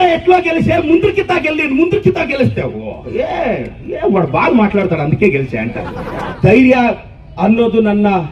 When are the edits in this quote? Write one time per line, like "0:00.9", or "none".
0:06.3